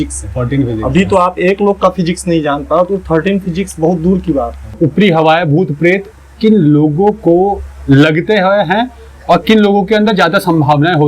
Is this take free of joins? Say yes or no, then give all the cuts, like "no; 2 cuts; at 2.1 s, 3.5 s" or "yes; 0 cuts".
no; 1 cut; at 4.8 s